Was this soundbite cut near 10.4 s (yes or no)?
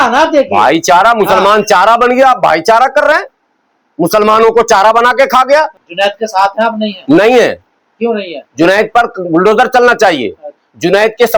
no